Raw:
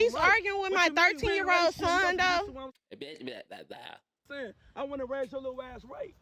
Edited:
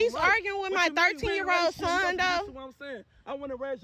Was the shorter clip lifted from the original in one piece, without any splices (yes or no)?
no